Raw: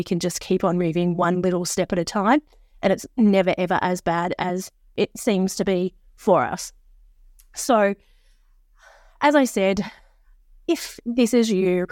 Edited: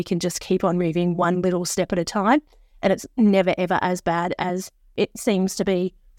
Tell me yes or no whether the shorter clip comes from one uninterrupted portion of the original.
yes